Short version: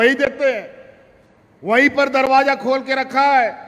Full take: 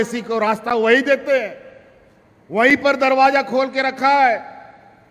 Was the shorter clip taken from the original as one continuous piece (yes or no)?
yes